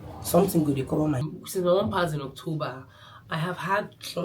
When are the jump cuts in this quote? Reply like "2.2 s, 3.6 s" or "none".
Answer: 1.2 s